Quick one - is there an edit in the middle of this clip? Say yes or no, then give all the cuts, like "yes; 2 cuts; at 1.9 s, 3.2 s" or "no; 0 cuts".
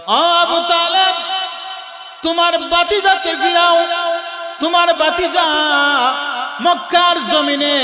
no; 0 cuts